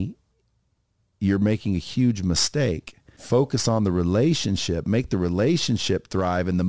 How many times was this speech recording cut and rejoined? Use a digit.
1